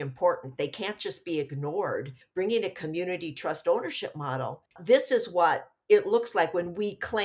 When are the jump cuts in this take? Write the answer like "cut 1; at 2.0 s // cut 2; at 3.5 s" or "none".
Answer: cut 1; at 2.1 s // cut 2; at 4.6 s